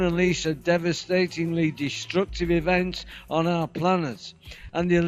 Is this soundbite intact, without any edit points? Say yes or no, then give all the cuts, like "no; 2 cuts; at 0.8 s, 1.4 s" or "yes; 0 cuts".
no; 1 cut; at 3.4 s